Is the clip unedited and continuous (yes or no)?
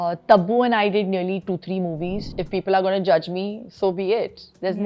no